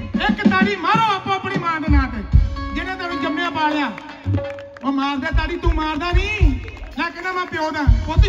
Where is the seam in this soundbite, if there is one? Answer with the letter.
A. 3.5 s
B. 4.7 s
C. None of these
C